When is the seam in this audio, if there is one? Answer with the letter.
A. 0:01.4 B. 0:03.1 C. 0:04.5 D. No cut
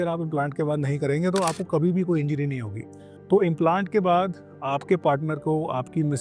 B